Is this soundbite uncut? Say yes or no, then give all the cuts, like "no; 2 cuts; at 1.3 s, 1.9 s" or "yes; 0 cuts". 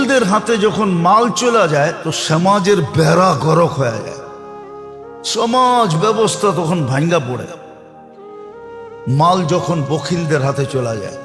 yes; 0 cuts